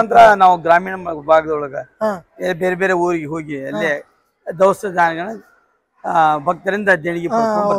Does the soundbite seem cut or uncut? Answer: uncut